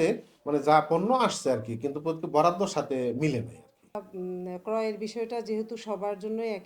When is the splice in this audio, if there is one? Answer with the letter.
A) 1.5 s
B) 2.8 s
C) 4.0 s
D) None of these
C